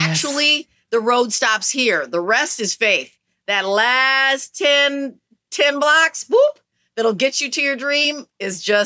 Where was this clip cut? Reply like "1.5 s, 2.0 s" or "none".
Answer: none